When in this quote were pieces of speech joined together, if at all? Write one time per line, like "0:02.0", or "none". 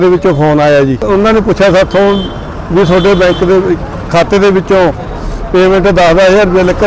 0:01.0